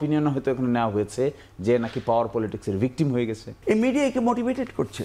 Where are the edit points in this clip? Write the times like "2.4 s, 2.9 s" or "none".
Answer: 3.5 s